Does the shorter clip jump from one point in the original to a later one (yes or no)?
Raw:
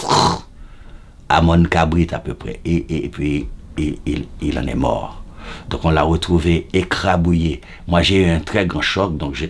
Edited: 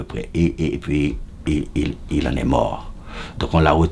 no